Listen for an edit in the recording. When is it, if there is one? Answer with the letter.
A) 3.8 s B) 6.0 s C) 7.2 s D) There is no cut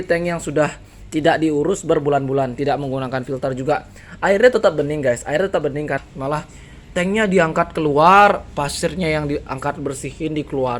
B